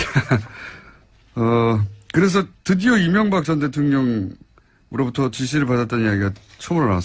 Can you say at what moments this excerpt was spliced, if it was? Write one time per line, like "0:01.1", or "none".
none